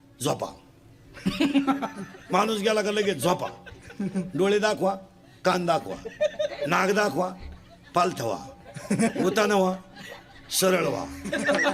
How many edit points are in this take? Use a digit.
1